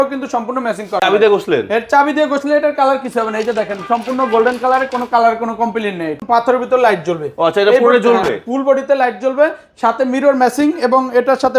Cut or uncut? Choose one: cut